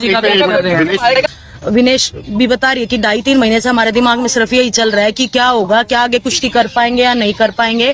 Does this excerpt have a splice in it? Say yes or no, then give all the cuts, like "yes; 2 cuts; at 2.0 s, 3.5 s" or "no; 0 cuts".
yes; 1 cut; at 1.2 s